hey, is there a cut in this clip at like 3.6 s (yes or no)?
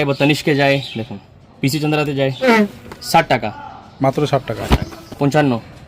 no